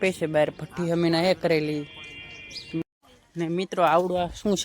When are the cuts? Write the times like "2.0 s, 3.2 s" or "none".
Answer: 2.8 s